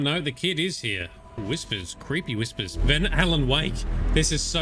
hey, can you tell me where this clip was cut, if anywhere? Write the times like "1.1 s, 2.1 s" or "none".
1.4 s